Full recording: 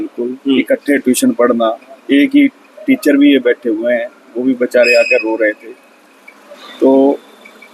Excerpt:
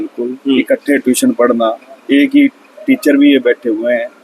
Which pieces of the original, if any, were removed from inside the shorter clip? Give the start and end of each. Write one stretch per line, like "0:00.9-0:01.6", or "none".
none